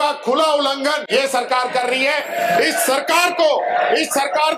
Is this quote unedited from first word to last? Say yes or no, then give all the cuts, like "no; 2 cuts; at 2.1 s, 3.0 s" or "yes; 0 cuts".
no; 1 cut; at 1.0 s